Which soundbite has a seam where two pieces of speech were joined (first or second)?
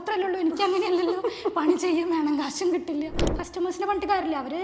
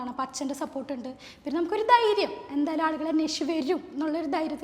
first